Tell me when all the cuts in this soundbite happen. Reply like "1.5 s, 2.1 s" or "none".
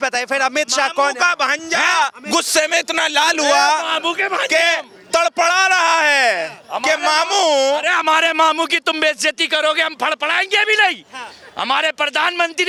none